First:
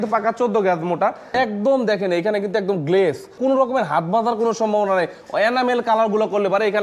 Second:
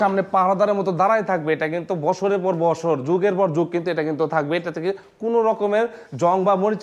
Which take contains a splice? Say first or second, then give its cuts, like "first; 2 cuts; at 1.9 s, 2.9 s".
first; 2 cuts; at 1.3 s, 3.4 s